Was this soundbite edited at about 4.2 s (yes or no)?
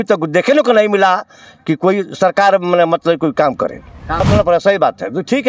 yes